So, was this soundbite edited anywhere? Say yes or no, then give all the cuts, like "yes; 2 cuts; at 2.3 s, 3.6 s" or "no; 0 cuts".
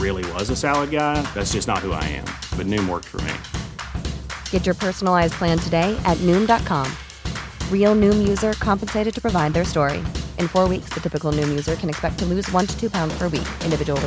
no; 0 cuts